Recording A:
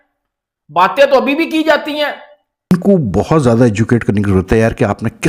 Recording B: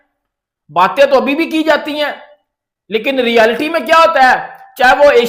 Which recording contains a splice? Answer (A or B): A